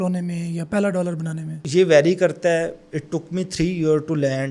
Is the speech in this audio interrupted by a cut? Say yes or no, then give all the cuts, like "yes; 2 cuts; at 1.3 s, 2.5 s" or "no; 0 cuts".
yes; 1 cut; at 1.6 s